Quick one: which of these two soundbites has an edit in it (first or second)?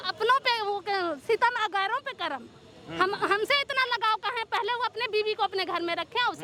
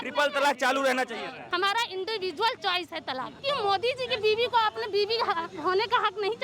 second